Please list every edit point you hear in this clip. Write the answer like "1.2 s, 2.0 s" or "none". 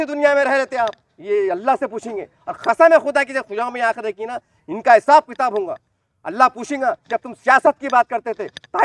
none

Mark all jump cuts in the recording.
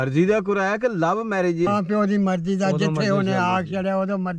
none

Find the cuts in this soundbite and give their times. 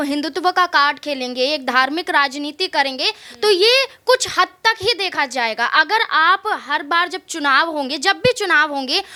none

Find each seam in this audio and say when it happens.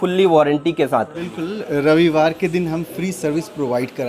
1.2 s

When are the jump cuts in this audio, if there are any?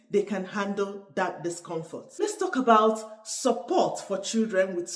2.2 s

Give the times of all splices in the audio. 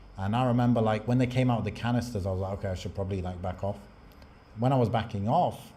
none

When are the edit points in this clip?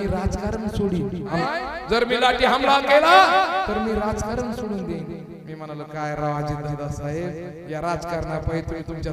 1.5 s

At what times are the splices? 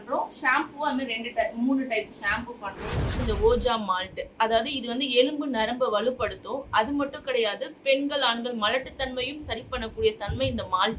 3.2 s

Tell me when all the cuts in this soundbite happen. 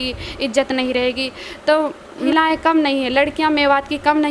2.3 s

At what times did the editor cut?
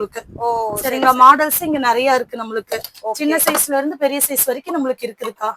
none

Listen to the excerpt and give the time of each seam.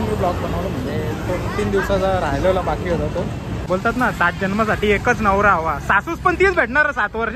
3.5 s

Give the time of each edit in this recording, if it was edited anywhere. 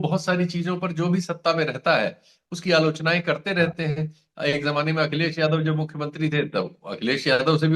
none

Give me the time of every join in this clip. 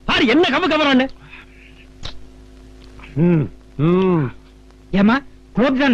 3.6 s

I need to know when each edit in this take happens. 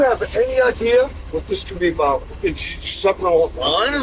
2.4 s

